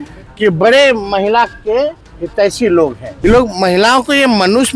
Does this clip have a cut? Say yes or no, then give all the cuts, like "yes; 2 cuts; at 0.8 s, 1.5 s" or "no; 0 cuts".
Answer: yes; 1 cut; at 3.1 s